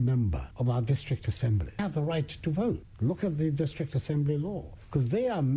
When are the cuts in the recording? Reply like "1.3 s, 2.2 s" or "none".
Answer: none

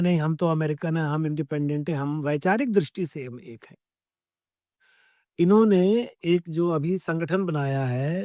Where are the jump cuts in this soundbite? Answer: none

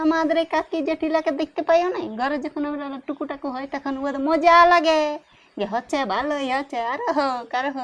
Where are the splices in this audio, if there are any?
none

